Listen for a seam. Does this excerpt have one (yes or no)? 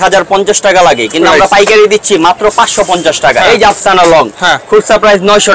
yes